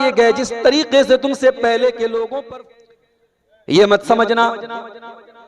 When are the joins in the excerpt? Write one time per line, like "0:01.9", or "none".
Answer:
0:02.4